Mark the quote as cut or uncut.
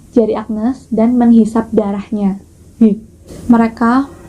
cut